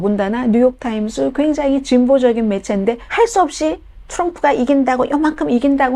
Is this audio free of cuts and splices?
no; 1 cut; at 3.0 s

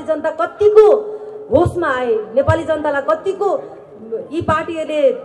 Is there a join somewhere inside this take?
no; 0 cuts

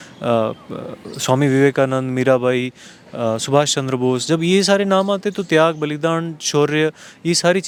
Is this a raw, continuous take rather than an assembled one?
yes; 0 cuts

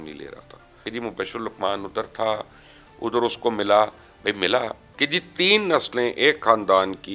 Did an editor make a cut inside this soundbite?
yes; 2 cuts; at 0.9 s, 4.8 s

